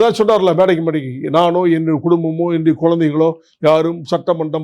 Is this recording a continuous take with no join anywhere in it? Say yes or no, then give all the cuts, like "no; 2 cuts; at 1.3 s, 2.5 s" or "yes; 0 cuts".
yes; 0 cuts